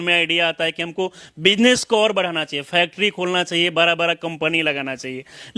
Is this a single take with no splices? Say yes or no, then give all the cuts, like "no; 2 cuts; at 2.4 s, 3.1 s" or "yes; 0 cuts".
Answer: yes; 0 cuts